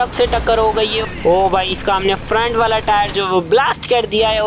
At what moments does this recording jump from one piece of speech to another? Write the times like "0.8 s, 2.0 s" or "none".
1.0 s